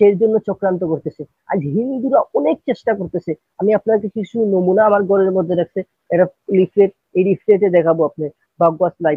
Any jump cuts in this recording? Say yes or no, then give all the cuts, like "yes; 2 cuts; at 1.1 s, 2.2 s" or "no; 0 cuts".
no; 0 cuts